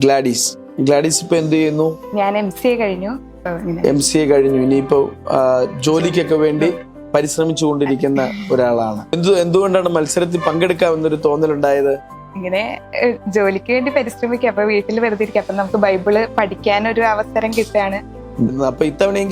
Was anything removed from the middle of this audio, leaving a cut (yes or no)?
yes